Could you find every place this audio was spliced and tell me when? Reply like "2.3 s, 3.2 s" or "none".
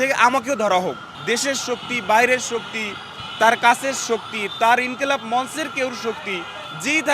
1.1 s